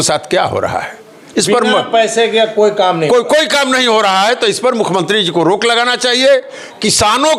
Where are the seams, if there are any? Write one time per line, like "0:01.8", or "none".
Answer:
none